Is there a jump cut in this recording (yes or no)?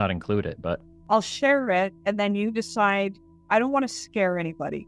yes